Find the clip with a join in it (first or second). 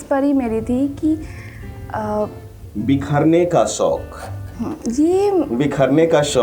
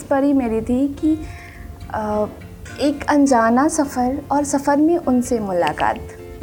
first